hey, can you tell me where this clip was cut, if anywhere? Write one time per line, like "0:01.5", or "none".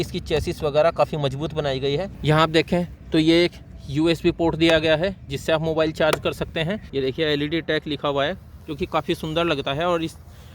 0:02.1
0:06.8